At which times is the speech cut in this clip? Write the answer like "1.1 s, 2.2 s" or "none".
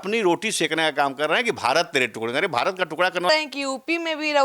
3.3 s